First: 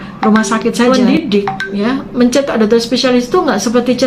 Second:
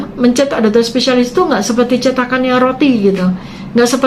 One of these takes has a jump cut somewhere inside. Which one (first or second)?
first